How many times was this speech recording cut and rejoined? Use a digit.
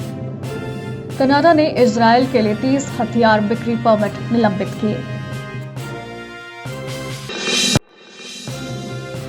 1